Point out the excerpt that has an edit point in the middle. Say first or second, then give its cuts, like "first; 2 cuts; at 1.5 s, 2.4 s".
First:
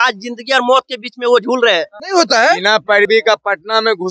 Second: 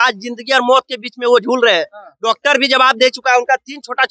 first; 1 cut; at 2.0 s